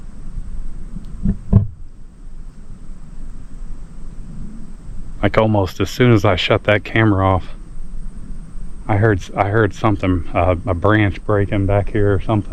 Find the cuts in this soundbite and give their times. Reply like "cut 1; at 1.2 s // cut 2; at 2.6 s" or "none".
none

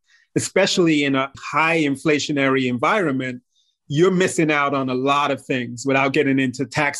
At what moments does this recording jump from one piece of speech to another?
cut 1; at 1.1 s

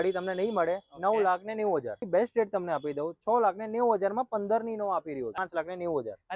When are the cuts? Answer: cut 1; at 2.0 s // cut 2; at 5.4 s

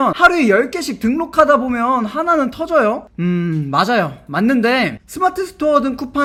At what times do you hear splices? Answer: none

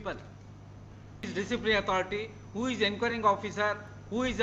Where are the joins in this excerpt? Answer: cut 1; at 1.3 s

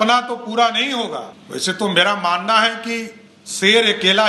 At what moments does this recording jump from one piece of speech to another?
cut 1; at 1.3 s

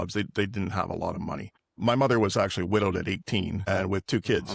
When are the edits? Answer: cut 1; at 1.6 s

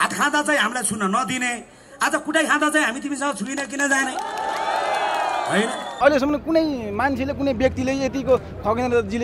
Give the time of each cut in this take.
cut 1; at 5.9 s

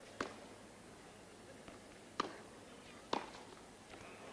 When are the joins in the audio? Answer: cut 1; at 2.9 s

